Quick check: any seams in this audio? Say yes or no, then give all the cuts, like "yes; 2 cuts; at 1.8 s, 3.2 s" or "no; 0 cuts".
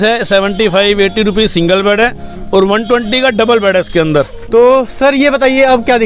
yes; 1 cut; at 4.4 s